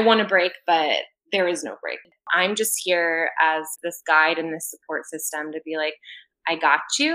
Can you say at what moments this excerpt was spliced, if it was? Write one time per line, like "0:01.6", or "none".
0:02.3
0:03.7